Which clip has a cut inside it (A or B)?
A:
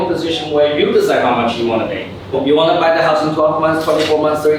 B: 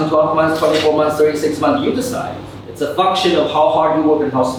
A